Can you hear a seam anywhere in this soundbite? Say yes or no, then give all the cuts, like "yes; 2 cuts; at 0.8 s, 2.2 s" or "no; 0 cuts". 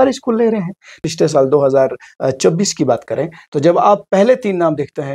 yes; 1 cut; at 1.0 s